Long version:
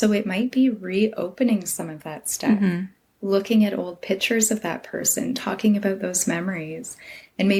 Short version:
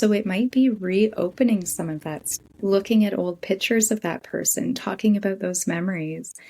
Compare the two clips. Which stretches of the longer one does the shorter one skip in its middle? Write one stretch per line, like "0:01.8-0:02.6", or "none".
0:02.3-0:02.9